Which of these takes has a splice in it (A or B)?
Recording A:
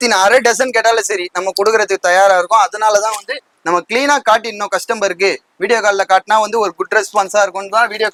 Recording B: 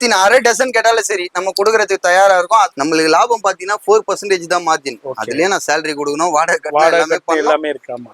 B